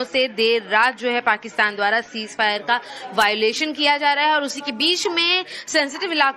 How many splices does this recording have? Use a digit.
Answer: 1